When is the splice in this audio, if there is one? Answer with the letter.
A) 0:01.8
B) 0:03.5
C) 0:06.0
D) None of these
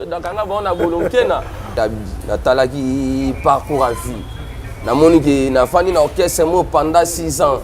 A